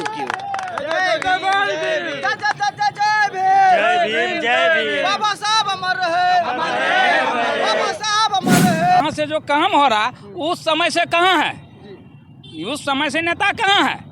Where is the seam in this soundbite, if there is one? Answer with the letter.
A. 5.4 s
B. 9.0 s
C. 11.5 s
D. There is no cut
B